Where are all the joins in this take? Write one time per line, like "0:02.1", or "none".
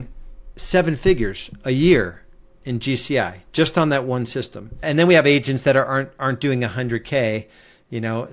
0:04.7